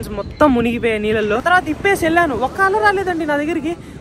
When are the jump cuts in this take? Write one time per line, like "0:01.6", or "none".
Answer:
0:01.4

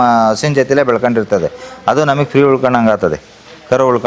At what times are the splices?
none

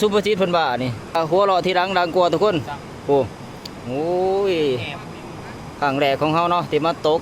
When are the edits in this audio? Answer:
0:01.2

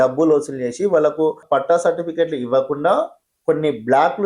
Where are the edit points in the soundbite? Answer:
0:01.4

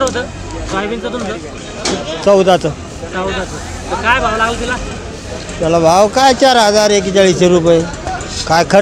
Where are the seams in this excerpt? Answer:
none

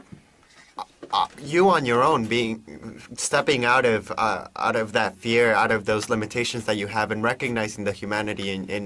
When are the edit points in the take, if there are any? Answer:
0:05.5

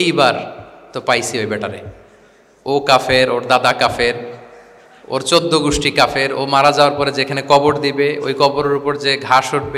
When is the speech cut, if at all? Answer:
none

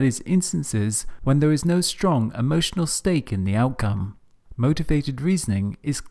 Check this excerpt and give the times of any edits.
none

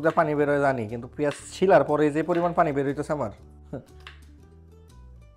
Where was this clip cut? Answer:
none

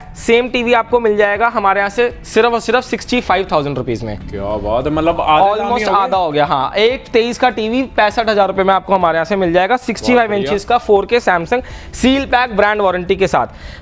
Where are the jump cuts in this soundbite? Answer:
none

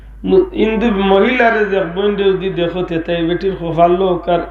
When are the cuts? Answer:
none

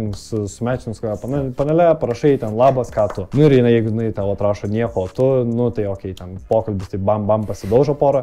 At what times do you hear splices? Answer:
0:03.2

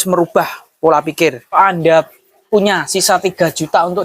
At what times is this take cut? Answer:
0:01.6

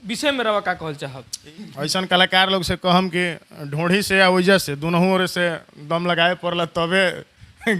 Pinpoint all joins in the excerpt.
0:01.5

